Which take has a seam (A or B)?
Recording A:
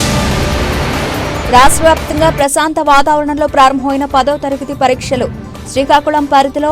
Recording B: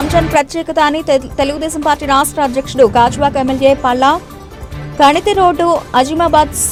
A